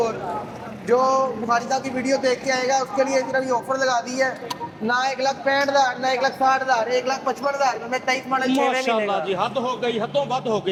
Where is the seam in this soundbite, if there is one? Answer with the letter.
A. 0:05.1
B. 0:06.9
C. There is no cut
C